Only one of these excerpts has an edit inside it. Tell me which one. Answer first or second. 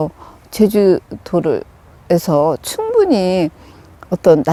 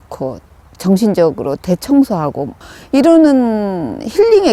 second